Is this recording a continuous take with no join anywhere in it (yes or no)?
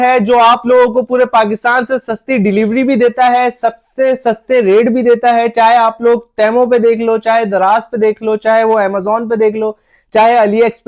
yes